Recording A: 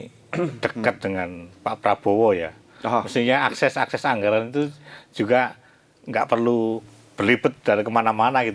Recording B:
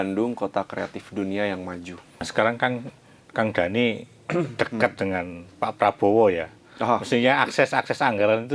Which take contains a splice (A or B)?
B